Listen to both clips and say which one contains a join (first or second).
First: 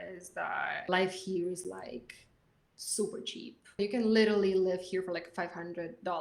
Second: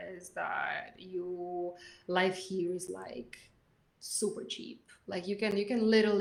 first